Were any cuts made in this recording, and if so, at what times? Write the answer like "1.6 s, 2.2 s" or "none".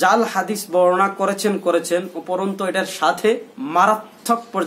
3.5 s

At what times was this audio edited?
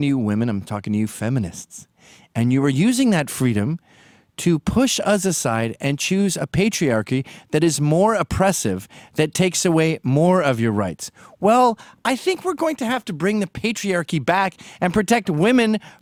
none

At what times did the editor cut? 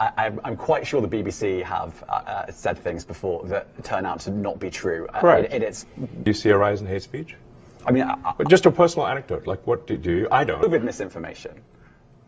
6.3 s, 10.6 s

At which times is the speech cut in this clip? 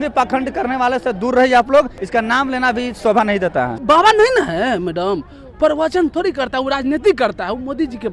2.0 s, 3.8 s

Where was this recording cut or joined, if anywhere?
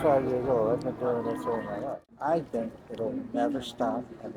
2.0 s

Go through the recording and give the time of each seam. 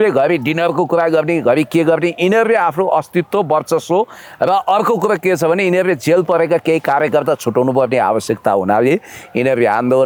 none

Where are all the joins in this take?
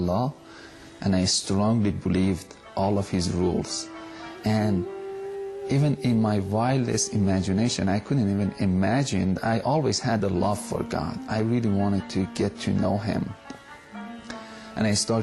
none

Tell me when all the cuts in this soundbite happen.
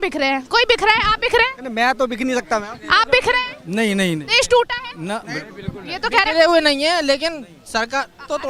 none

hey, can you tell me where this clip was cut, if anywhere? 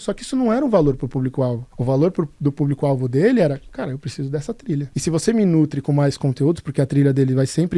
1.7 s, 4.9 s

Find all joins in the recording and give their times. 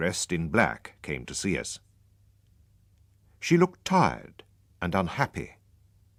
none

